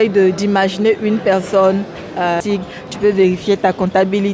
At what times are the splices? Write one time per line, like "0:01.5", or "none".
0:02.4